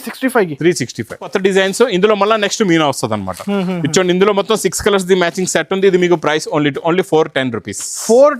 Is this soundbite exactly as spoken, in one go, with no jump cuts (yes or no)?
no